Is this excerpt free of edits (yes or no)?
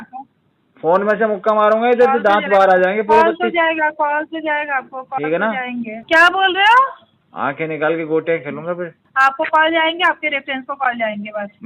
no